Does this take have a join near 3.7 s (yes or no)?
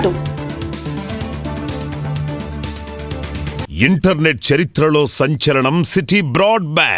yes